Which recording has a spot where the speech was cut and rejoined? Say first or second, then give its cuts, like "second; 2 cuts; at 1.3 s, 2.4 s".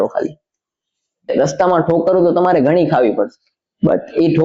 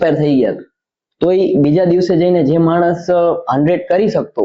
first; 1 cut; at 1.3 s